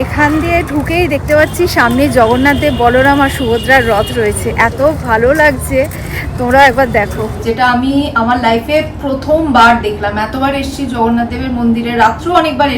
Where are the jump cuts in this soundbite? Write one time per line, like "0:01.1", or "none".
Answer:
0:07.4